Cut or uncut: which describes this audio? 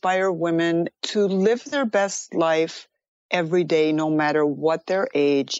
cut